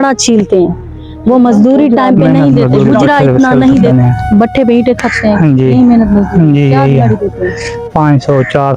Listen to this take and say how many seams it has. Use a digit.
1